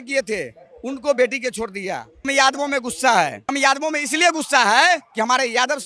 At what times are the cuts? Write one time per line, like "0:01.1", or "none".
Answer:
0:02.3
0:03.5
0:05.1